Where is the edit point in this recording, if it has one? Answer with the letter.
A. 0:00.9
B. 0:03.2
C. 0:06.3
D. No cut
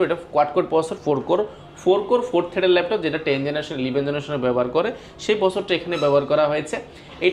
D